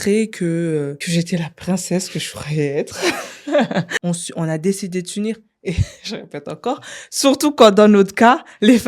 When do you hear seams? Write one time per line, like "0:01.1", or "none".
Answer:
0:01.0
0:03.9

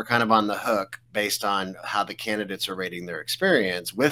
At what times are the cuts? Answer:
0:01.0

